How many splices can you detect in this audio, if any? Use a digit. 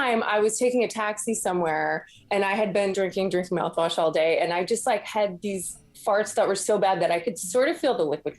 1